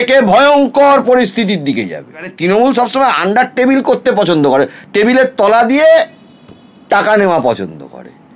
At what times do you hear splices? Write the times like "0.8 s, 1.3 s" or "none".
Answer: 2.3 s